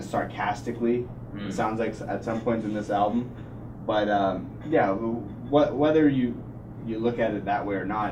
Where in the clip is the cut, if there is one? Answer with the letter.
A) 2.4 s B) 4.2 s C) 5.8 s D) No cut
D